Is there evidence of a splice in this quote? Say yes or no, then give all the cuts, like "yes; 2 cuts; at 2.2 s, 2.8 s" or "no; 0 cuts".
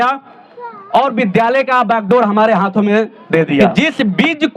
yes; 1 cut; at 3.7 s